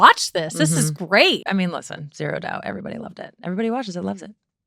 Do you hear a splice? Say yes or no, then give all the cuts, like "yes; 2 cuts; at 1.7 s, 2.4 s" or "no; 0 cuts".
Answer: yes; 1 cut; at 1.5 s